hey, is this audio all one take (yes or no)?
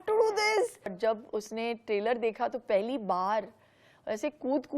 no